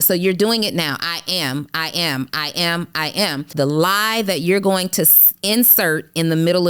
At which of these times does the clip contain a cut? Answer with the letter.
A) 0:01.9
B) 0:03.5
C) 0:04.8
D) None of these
B